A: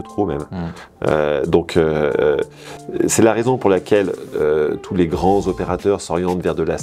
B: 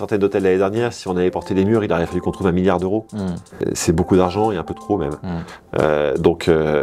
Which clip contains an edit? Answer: B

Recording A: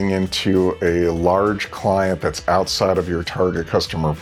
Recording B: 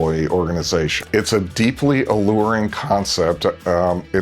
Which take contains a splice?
B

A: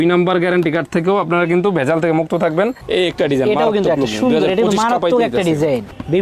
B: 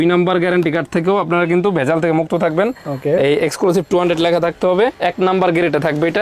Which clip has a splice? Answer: A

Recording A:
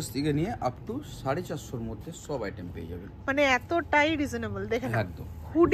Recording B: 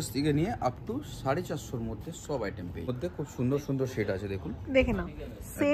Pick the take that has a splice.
B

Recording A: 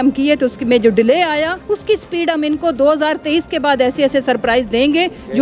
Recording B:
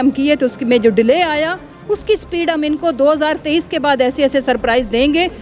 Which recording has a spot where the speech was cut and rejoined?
A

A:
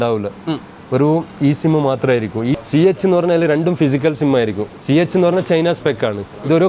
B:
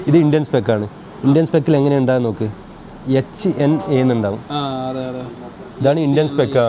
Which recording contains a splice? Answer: A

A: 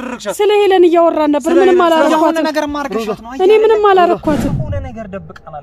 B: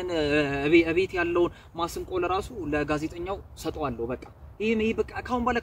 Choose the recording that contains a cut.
A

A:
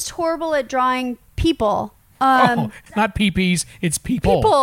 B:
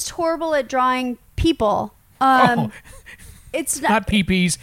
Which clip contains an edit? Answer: A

